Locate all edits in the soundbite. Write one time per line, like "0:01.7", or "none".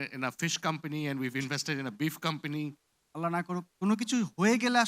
0:03.1